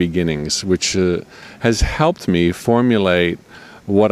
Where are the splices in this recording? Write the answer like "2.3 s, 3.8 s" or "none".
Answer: 1.4 s